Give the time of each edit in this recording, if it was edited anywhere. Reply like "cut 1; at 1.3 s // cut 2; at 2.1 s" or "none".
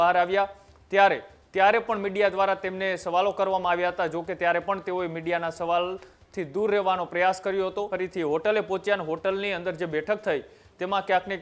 cut 1; at 7.9 s